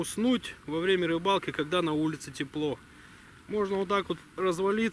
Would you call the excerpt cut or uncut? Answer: uncut